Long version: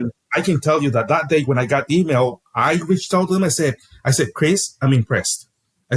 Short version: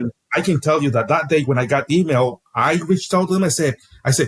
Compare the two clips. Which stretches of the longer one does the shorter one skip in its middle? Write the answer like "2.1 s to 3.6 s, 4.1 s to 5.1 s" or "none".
none